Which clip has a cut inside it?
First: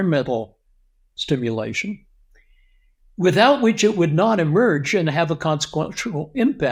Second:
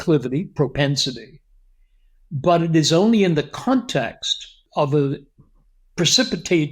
second; 1 cut; at 4.6 s

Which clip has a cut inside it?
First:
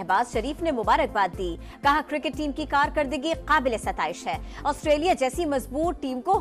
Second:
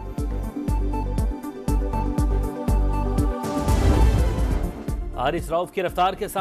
second; 1 cut; at 4.4 s

